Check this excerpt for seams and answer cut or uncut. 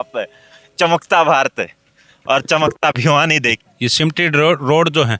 cut